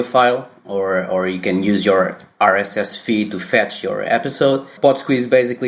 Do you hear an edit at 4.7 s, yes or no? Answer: yes